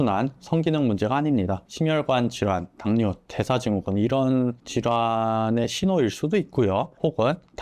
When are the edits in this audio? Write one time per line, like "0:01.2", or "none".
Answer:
0:01.7